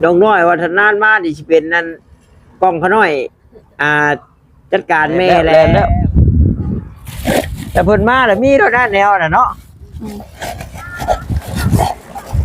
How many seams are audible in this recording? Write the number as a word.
one